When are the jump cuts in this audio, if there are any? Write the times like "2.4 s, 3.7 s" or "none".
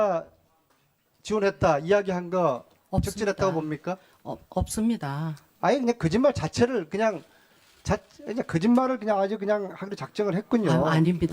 9.7 s